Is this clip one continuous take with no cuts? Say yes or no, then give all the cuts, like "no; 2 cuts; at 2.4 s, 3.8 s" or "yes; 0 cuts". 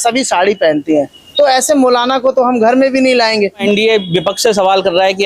no; 1 cut; at 3.6 s